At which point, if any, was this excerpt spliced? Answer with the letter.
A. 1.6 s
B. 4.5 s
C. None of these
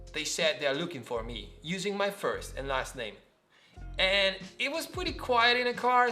C